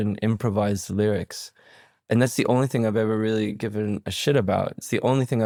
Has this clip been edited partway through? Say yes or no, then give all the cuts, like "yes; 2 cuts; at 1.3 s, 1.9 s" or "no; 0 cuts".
no; 0 cuts